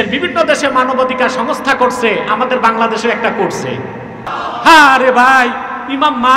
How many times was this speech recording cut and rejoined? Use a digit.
1